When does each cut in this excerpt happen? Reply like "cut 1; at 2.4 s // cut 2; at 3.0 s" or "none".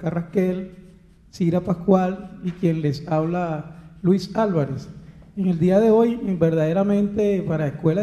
none